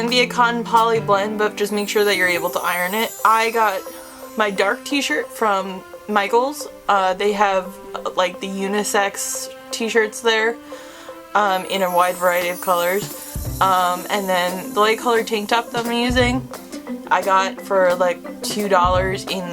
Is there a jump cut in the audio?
yes; 2 cuts; at 3.1 s, 14.6 s

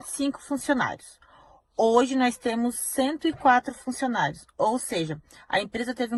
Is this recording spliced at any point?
no; 0 cuts

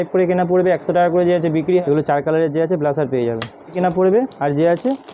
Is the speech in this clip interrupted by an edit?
yes; 2 cuts; at 1.8 s, 3.7 s

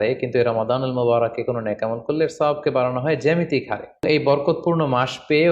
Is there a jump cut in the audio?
yes; 1 cut; at 4.0 s

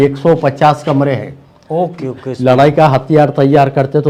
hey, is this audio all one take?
yes; 0 cuts

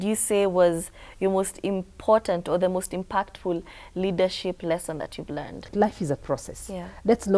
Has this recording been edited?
yes; 1 cut; at 5.7 s

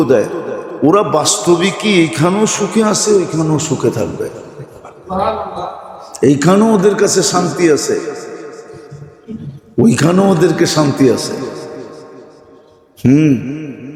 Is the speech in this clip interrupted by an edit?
no; 0 cuts

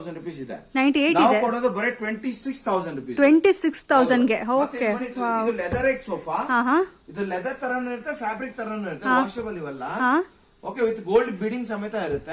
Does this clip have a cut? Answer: no; 0 cuts

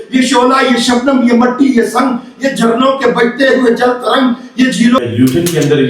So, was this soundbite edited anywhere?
yes; 1 cut; at 5.0 s

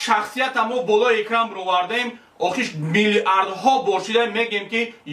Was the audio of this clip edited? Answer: no; 0 cuts

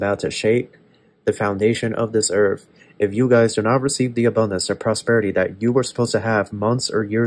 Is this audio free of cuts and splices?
yes; 0 cuts

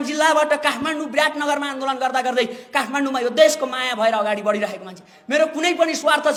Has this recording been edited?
no; 0 cuts

